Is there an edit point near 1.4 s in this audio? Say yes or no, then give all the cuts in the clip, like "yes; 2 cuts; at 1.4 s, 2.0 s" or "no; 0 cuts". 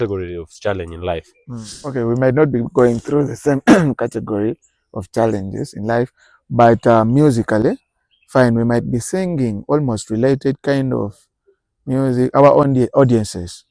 yes; 1 cut; at 1.4 s